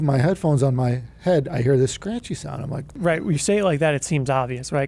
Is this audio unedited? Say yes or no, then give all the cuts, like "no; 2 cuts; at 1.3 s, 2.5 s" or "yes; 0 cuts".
no; 1 cut; at 2.9 s